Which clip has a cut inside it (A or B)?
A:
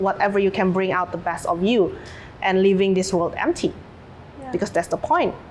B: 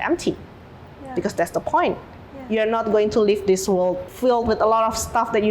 B